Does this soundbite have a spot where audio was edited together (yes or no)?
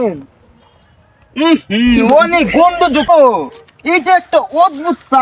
yes